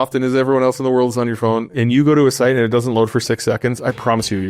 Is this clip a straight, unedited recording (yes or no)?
yes